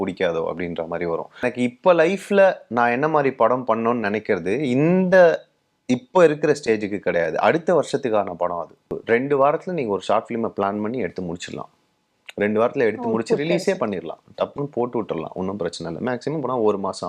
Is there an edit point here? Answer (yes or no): yes